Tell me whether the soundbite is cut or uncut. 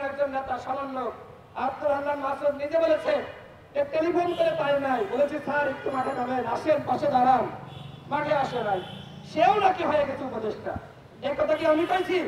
uncut